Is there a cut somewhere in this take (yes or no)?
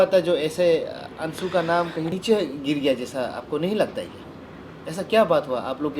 no